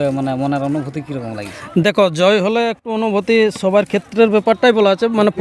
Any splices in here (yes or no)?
no